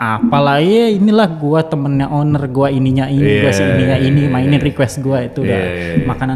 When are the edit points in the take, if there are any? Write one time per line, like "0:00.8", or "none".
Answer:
none